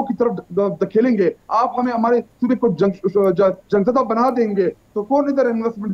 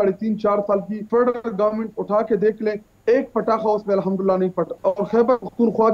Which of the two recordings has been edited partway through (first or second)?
second